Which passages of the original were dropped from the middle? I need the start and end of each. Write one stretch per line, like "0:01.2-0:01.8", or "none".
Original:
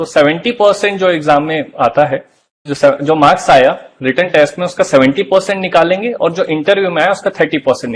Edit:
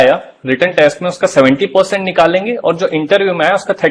none